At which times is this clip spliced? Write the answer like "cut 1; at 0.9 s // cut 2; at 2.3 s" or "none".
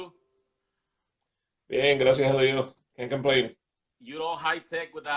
cut 1; at 3.4 s